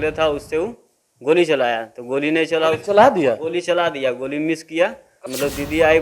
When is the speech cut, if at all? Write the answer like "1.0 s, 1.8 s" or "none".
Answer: 5.1 s